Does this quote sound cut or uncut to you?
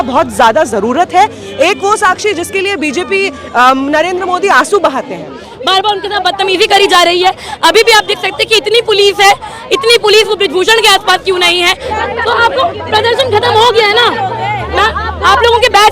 cut